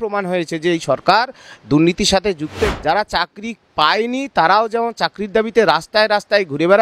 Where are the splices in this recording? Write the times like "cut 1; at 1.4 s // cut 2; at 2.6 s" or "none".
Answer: cut 1; at 2.7 s